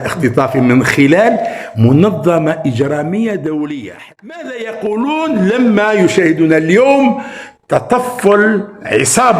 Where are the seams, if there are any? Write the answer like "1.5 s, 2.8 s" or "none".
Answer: 4.0 s

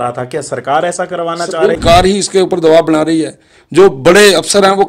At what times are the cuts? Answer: 1.8 s

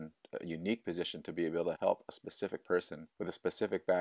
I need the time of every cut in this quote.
1.8 s, 3.0 s

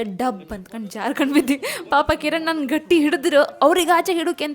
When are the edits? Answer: none

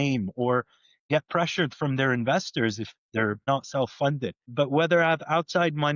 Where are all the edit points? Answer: 1.1 s, 3.5 s, 4.5 s

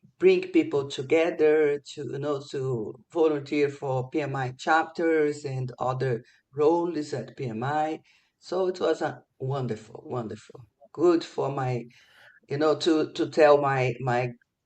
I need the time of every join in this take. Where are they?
none

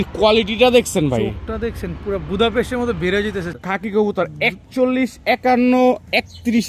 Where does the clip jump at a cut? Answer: 3.6 s

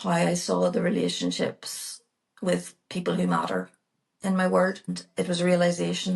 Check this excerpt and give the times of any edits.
5.0 s

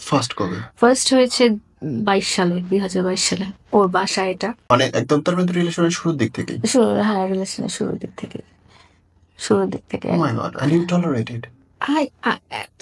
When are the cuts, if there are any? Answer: none

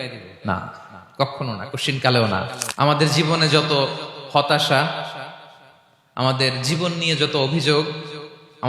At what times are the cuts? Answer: 2.6 s

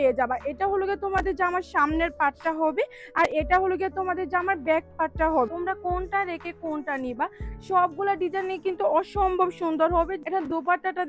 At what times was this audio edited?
5.5 s, 10.2 s

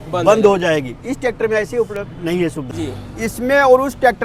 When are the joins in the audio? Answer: 2.7 s

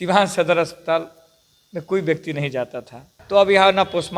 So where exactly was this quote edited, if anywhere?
3.1 s

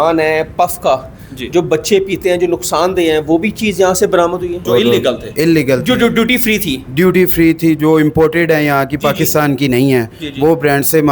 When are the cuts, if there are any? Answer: 4.6 s

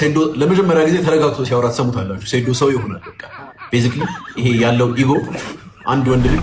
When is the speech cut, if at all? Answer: none

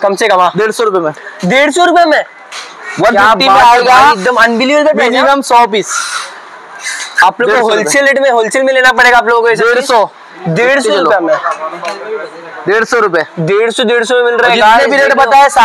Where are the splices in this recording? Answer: none

